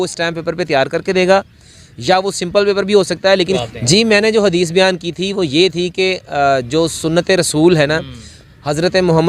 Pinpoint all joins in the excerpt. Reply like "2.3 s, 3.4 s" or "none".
3.6 s